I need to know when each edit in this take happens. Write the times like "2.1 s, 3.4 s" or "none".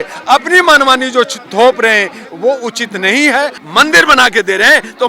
3.6 s